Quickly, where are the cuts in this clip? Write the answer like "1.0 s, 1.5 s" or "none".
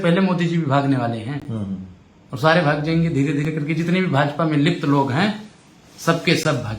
none